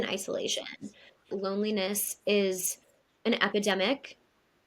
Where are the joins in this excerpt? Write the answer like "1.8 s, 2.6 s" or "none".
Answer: 1.4 s